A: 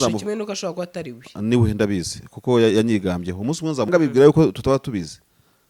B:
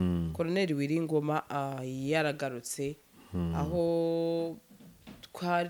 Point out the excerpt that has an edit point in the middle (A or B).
A